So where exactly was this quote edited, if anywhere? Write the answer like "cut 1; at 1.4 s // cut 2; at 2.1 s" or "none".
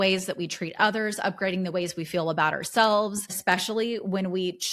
cut 1; at 3.4 s

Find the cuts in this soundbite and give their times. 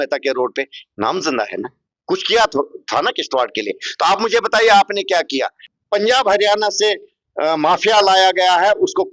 cut 1; at 5.6 s

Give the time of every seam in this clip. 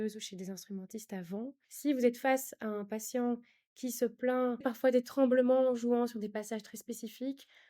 cut 1; at 1.6 s // cut 2; at 4.6 s

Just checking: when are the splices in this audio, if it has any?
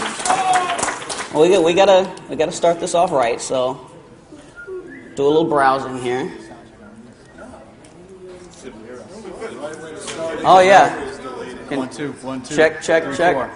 none

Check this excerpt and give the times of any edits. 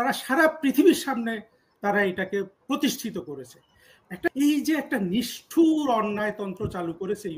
cut 1; at 4.3 s

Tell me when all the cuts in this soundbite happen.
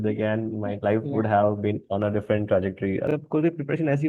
cut 1; at 3.1 s

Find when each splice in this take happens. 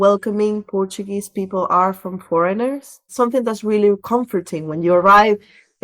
cut 1; at 3.1 s

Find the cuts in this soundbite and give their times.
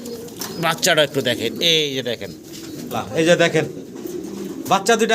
cut 1; at 2.8 s

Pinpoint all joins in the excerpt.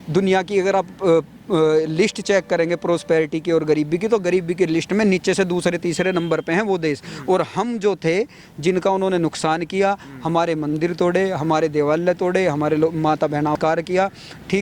cut 1; at 13.6 s

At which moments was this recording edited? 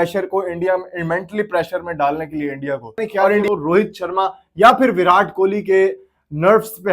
cut 1; at 3.4 s

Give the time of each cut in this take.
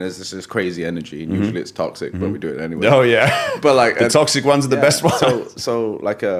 none

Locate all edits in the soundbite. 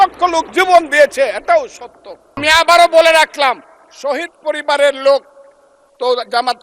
cut 1; at 2.4 s

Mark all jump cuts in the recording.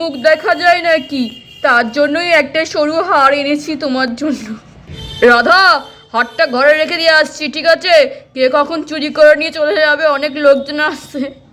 none

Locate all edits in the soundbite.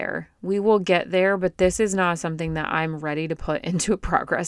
none

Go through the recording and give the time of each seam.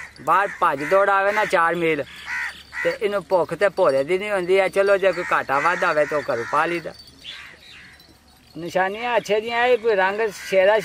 cut 1; at 7.2 s

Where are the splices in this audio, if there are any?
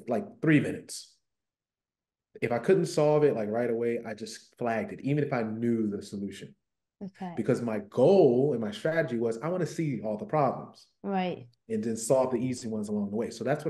none

